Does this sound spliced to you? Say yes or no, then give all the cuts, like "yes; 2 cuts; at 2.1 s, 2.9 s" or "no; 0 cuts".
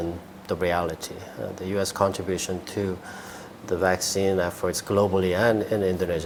no; 0 cuts